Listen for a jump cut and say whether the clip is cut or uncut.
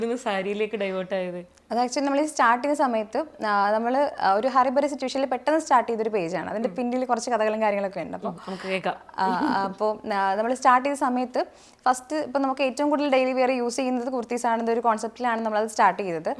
uncut